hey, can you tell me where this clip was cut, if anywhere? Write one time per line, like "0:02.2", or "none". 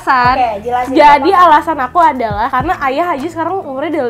0:02.5

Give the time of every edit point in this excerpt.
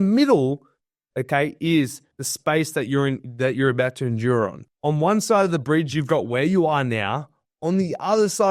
0:04.6

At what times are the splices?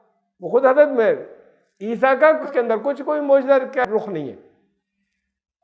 0:03.8

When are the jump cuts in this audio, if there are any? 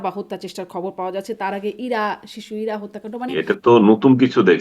0:03.3

